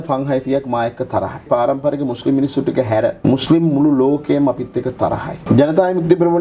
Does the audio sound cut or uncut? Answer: cut